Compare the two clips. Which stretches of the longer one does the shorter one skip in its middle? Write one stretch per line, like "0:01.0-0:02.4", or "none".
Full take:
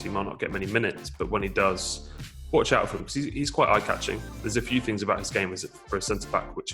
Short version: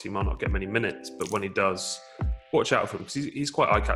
none